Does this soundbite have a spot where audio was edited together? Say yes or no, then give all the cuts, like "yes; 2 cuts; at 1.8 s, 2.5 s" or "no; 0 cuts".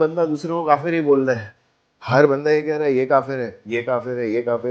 no; 0 cuts